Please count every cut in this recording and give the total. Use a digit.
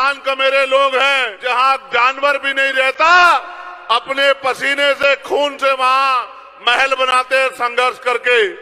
1